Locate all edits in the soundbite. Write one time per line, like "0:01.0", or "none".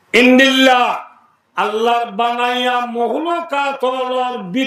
none